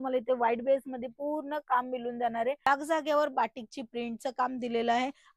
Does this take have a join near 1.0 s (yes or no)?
no